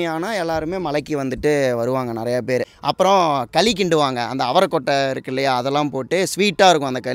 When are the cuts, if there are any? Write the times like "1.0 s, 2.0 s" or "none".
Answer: 2.7 s